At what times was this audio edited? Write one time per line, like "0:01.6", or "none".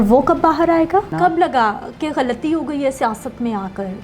0:01.1